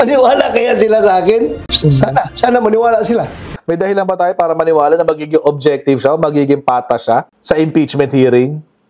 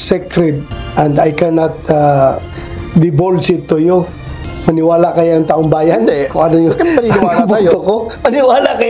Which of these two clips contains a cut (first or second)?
first